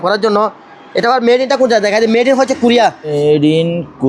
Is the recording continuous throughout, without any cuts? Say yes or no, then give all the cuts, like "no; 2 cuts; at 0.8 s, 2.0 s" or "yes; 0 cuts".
no; 1 cut; at 3.1 s